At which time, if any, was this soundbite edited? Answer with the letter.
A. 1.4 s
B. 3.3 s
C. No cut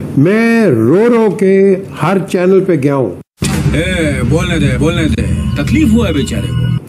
C